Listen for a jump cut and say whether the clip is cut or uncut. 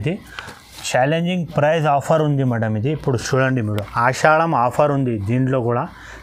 uncut